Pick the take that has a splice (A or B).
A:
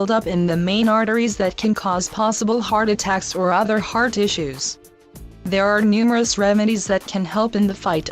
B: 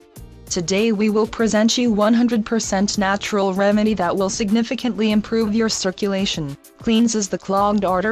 A